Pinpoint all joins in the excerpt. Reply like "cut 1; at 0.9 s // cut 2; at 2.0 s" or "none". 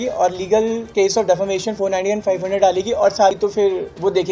cut 1; at 3.4 s